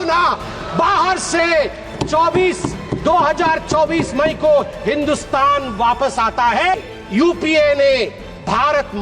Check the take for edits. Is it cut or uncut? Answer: cut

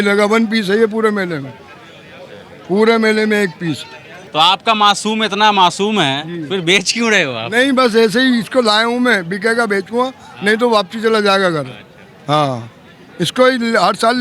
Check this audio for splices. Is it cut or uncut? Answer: cut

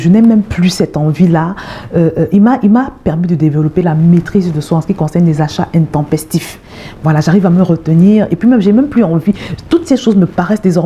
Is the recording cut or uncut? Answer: uncut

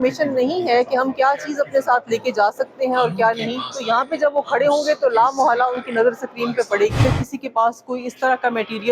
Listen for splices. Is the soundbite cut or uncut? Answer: cut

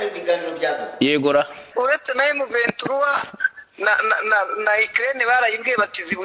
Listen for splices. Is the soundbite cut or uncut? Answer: cut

